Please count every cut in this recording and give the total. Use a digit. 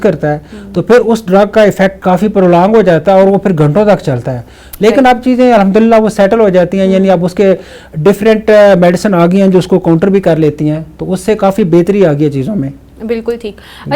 0